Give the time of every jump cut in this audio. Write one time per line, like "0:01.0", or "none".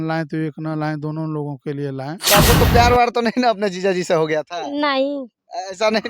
0:02.2